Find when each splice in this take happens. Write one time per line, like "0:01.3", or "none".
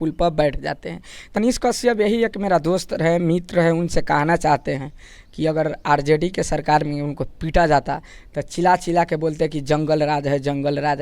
0:01.3